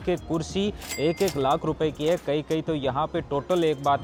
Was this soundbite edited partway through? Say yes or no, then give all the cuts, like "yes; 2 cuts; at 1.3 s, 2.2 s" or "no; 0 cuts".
no; 0 cuts